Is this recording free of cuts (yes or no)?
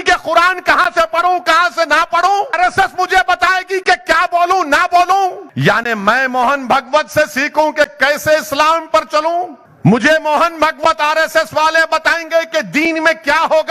no